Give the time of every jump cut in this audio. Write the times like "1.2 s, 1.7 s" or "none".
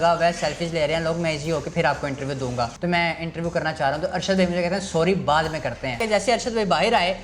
2.8 s, 6.0 s